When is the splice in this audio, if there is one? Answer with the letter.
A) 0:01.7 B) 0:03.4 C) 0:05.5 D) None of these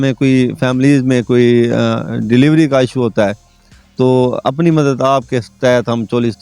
D